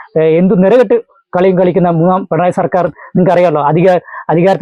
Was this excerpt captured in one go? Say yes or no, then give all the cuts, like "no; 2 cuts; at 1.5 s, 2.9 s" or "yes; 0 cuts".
yes; 0 cuts